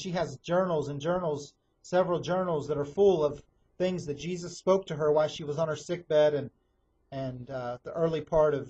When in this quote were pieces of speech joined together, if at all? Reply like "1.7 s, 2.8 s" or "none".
none

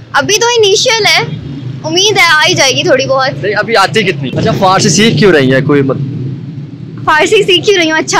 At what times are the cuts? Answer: 4.2 s

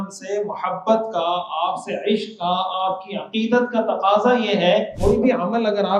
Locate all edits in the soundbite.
4.9 s

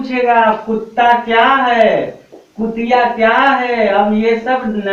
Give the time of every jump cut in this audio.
none

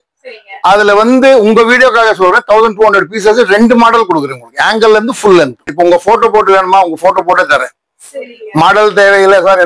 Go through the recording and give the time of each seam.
5.7 s

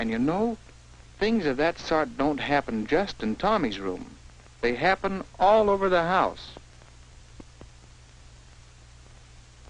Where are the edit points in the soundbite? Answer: none

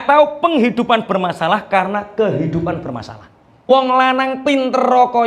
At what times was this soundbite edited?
3.7 s

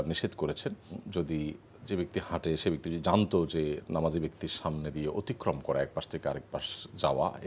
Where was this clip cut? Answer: 1.0 s

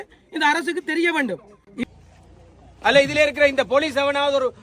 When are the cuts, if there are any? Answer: 1.9 s

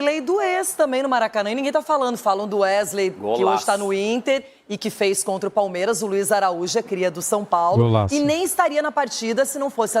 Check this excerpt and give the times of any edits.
none

